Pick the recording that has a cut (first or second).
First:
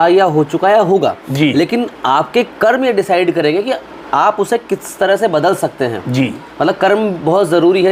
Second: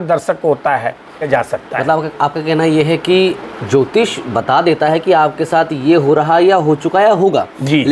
second